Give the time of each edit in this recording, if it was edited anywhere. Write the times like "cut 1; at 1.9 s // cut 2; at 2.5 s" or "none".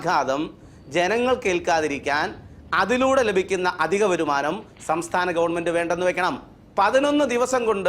cut 1; at 6.6 s